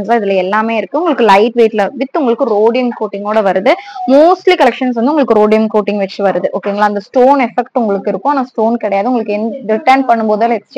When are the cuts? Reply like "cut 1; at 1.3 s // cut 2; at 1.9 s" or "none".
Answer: none